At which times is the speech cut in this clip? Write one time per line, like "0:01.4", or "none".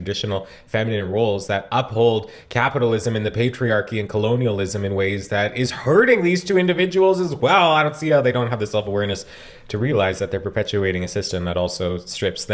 none